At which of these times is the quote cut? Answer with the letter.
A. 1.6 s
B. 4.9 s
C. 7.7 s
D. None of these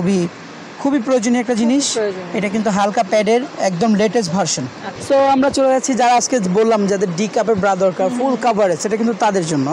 B